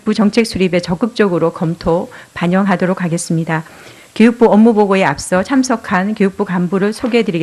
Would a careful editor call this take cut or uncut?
cut